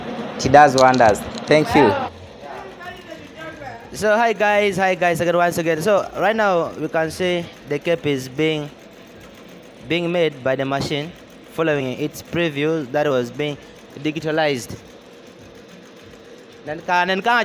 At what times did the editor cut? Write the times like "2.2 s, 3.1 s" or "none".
none